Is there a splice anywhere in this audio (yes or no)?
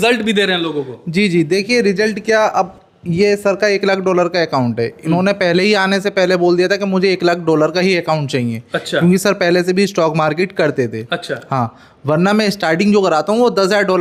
no